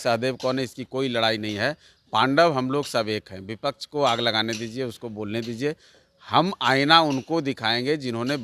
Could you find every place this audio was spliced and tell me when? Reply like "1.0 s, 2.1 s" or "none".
none